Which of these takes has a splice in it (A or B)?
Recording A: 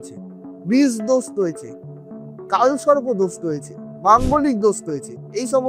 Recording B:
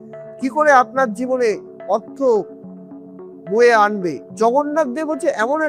B